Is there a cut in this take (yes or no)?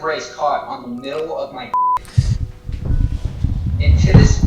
no